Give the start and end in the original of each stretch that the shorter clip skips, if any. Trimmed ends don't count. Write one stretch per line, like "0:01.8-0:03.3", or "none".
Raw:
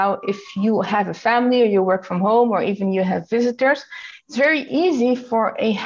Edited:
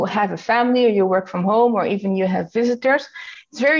none